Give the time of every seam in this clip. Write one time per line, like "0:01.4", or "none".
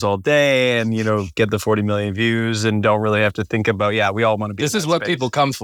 none